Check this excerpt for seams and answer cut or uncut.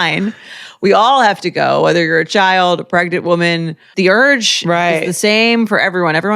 cut